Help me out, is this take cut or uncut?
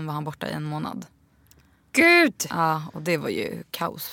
uncut